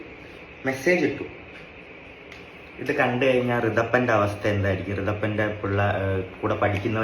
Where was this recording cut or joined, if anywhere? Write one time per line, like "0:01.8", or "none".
none